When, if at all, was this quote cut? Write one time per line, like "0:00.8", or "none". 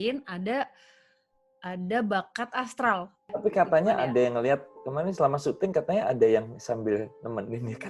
0:03.3